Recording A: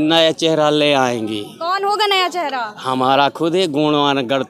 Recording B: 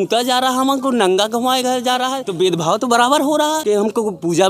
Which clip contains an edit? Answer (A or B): B